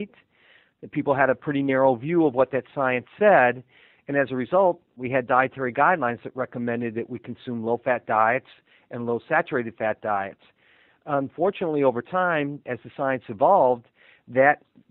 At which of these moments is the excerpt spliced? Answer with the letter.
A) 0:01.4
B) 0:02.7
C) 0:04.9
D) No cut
C